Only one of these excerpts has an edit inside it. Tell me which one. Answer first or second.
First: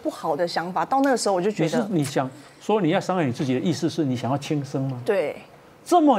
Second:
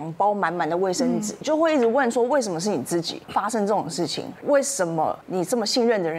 second